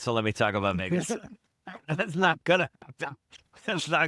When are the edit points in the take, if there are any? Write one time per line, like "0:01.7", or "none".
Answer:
none